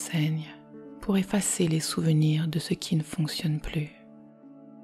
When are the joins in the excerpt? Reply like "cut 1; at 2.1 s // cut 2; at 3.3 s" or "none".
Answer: cut 1; at 3.9 s

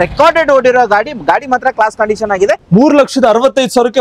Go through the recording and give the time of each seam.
cut 1; at 2.6 s

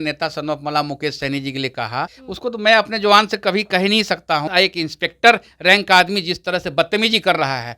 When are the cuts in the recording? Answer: cut 1; at 2.2 s // cut 2; at 4.5 s

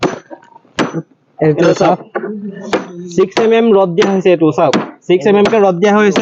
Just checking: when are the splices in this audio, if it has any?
none

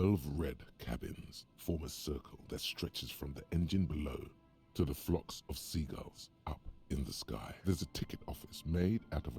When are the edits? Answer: cut 1; at 7.5 s

